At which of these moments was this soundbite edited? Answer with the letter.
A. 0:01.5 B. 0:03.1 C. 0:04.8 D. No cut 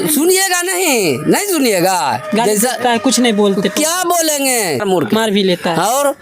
C